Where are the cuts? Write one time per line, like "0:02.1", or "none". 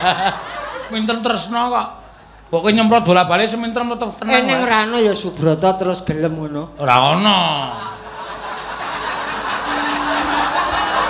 0:00.9